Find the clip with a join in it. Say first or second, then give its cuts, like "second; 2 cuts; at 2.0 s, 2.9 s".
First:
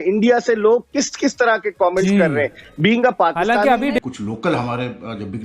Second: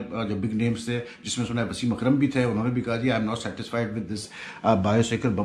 first; 1 cut; at 4.0 s